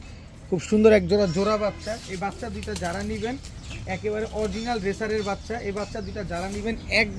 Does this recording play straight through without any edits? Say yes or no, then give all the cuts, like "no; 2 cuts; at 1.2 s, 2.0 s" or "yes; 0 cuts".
yes; 0 cuts